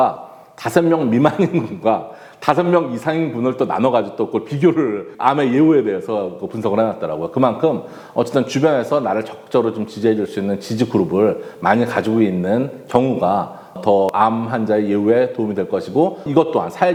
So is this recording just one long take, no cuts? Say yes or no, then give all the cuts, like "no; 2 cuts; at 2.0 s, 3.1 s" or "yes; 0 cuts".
yes; 0 cuts